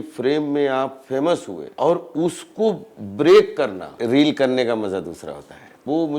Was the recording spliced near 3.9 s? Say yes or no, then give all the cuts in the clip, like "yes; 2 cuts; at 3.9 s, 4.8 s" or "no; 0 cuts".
yes; 2 cuts; at 1.6 s, 3.9 s